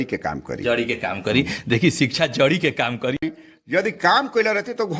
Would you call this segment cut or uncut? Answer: cut